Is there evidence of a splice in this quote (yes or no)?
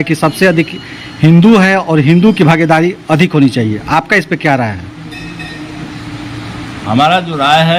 no